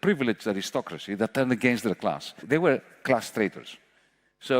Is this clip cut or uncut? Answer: cut